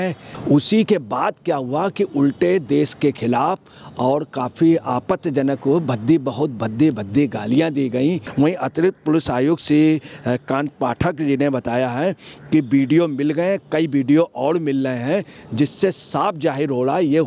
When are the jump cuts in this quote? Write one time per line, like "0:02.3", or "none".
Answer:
0:08.2